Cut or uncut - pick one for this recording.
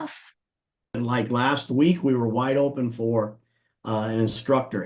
cut